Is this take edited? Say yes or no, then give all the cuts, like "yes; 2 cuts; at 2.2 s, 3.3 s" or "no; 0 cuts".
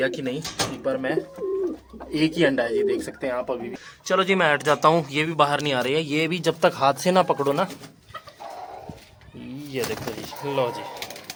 no; 0 cuts